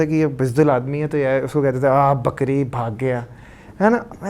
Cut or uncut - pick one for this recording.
uncut